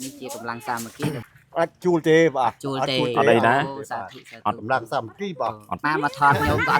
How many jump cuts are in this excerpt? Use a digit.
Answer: 2